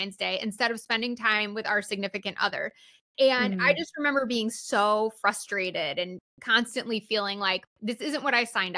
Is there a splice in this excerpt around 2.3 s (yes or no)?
no